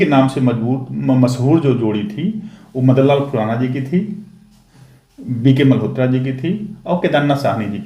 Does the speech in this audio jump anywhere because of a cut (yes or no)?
no